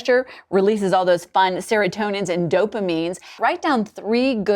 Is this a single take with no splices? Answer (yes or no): no